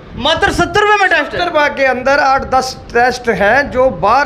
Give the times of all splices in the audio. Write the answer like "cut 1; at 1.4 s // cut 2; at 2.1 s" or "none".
none